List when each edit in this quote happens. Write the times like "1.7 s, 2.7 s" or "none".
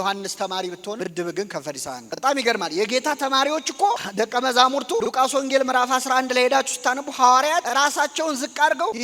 none